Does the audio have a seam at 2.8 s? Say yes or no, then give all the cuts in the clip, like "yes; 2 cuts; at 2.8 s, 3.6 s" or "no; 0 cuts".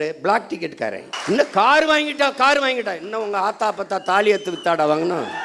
no; 1 cut; at 1.1 s